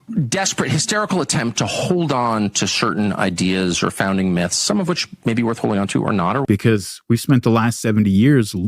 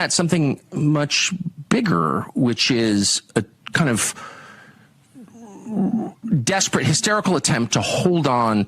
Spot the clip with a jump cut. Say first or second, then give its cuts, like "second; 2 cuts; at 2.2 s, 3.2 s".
first; 1 cut; at 6.4 s